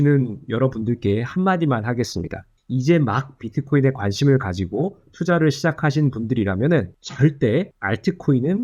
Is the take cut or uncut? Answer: uncut